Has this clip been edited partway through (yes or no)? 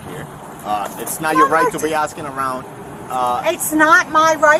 no